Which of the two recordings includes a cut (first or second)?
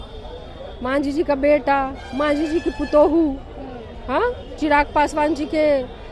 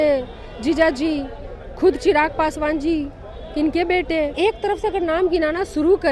second